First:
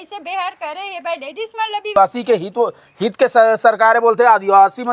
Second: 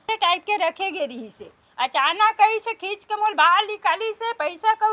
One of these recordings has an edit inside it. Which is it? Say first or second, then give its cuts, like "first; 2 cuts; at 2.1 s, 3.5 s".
first; 1 cut; at 1.9 s